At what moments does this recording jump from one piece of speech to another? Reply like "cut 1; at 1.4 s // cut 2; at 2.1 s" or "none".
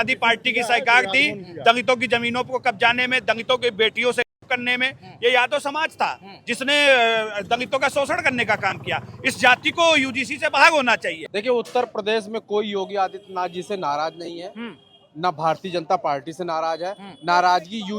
cut 1; at 11.2 s